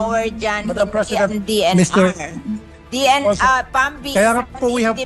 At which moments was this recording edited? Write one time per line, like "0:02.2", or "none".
none